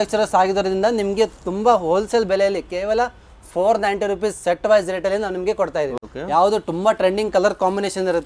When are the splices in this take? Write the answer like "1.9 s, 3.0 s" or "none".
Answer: 6.0 s